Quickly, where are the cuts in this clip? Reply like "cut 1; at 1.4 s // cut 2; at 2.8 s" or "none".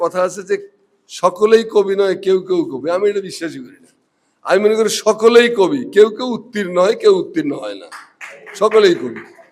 none